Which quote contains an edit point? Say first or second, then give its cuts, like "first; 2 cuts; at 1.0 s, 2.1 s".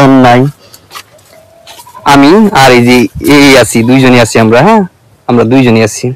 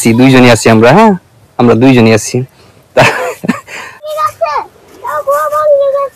second; 1 cut; at 4.1 s